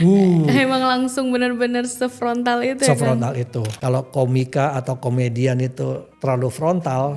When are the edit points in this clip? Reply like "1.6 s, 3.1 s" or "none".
3.8 s, 6.1 s